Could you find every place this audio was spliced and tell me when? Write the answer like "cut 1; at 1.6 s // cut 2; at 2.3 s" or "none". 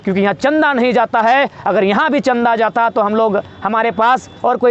none